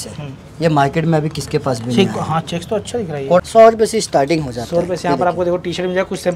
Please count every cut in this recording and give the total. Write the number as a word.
one